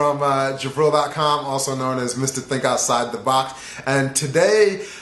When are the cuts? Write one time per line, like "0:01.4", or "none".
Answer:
none